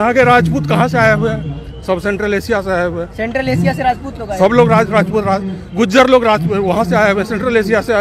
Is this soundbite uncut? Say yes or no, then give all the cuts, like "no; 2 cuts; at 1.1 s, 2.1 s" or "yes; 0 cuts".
yes; 0 cuts